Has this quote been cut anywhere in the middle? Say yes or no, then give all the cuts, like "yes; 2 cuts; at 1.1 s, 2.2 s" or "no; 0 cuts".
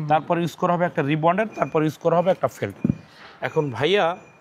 no; 0 cuts